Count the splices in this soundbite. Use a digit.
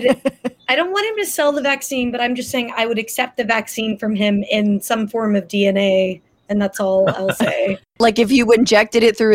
1